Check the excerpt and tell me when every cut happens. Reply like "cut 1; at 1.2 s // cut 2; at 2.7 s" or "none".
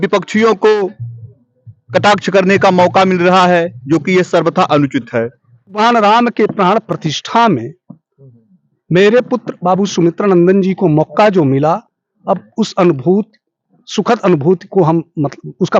cut 1; at 5.7 s